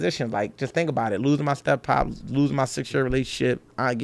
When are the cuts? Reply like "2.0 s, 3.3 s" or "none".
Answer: none